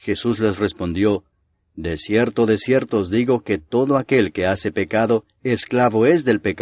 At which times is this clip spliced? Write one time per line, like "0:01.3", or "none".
none

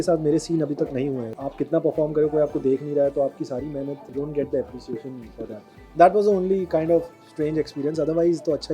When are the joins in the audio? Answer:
0:01.3
0:05.6

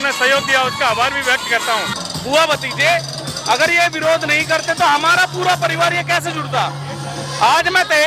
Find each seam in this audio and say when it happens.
0:02.0

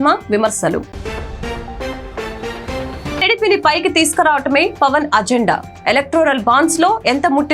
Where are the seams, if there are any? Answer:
none

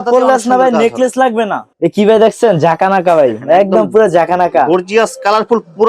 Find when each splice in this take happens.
0:01.7

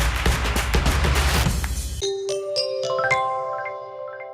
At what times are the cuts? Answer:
0:01.8

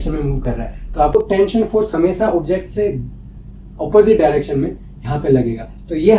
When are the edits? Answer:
0:01.1

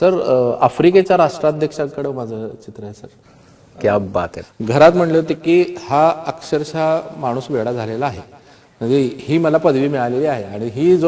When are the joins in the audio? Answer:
0:04.4

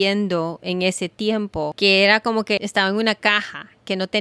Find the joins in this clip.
0:01.7
0:02.6

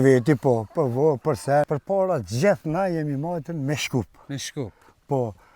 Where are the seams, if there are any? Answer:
0:01.7

